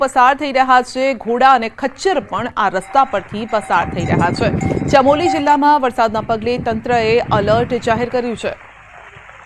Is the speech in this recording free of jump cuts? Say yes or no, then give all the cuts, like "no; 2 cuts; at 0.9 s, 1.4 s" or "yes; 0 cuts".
yes; 0 cuts